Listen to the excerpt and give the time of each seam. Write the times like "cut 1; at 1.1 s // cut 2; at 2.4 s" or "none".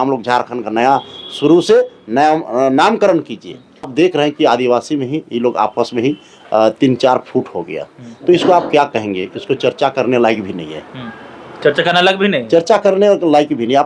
cut 1; at 3.9 s